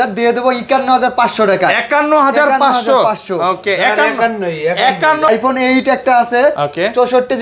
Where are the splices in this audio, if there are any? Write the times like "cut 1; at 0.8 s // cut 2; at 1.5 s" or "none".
cut 1; at 5.3 s